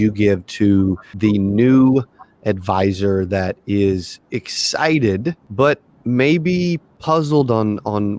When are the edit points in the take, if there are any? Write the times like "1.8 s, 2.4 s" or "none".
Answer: 1.1 s, 5.4 s, 6.9 s